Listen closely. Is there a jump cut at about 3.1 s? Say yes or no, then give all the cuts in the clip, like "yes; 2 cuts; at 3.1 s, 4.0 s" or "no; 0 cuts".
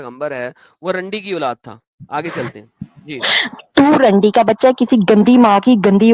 no; 0 cuts